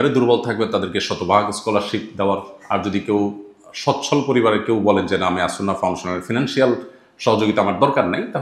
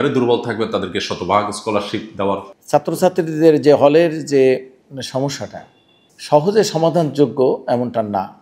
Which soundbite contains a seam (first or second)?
second